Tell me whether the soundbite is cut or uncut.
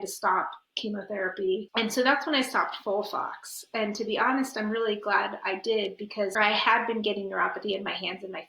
cut